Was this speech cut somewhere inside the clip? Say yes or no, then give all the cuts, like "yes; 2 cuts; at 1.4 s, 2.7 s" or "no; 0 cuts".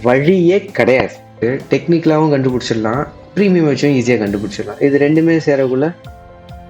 yes; 1 cut; at 1.4 s